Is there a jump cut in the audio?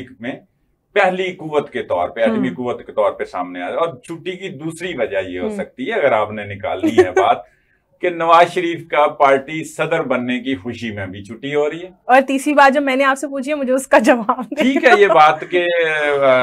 no; 0 cuts

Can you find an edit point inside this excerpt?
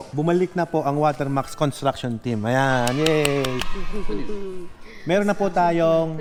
no; 0 cuts

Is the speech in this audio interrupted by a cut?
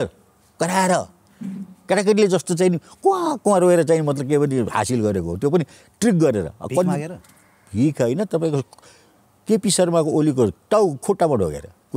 no; 0 cuts

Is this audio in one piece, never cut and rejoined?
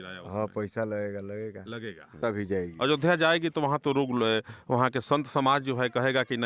no; 1 cut; at 2.2 s

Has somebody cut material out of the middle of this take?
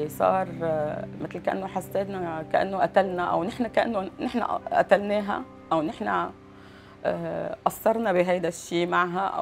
no; 0 cuts

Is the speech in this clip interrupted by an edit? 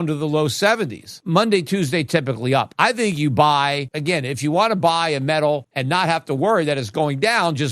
yes; 4 cuts; at 1.0 s, 2.7 s, 3.9 s, 5.7 s

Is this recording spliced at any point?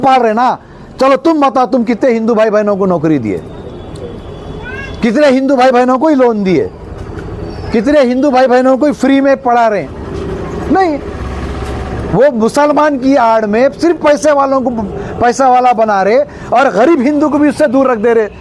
no; 0 cuts

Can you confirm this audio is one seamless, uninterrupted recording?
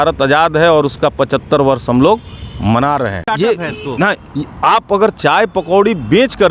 no; 1 cut; at 3.3 s

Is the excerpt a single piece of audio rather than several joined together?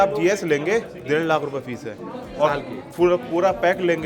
yes; 0 cuts

